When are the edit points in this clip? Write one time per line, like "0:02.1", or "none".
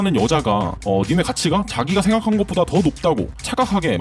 none